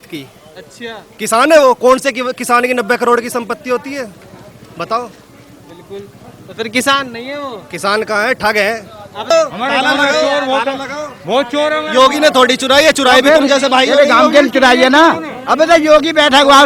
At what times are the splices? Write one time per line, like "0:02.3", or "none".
0:09.3